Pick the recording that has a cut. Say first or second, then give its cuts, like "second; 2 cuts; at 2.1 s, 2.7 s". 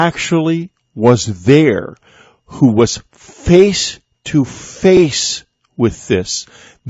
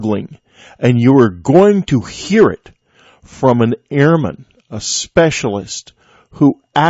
second; 1 cut; at 2.6 s